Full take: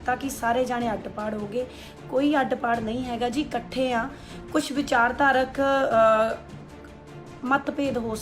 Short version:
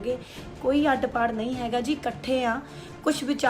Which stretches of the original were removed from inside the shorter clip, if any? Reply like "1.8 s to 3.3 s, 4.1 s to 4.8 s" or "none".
none